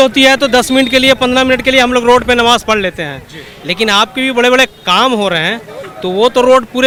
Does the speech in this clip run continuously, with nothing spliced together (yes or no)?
yes